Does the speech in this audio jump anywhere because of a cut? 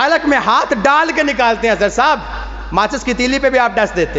no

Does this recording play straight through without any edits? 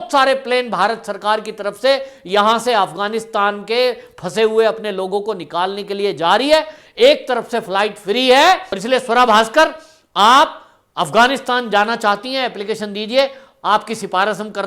no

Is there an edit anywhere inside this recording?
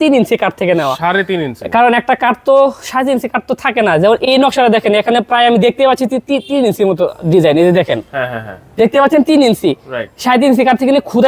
no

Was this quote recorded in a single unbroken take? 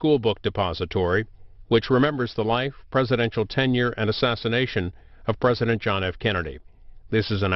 yes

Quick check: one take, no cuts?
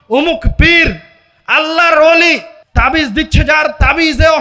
no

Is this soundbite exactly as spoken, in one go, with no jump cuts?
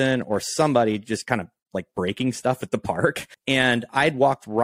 no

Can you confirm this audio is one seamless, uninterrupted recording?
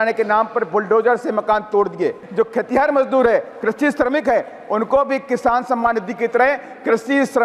no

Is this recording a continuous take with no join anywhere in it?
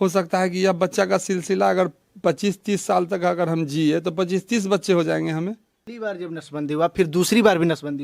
no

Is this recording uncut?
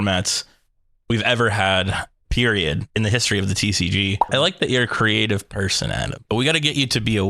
no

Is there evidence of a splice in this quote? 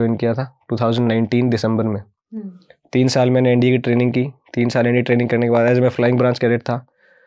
no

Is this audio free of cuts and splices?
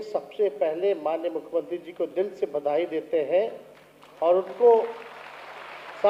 yes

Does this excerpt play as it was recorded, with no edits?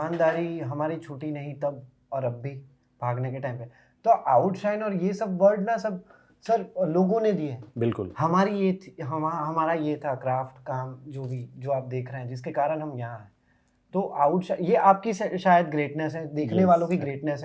yes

